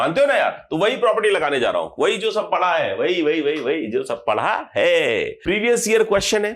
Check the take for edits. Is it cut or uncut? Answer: cut